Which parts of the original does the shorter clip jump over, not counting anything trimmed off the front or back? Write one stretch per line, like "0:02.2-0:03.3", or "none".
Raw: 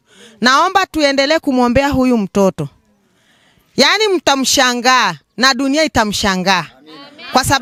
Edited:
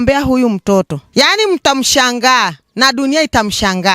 0:02.7-0:03.6